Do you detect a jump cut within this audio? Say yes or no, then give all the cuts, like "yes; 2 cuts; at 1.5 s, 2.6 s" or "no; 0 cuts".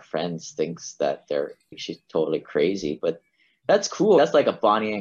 yes; 1 cut; at 1.7 s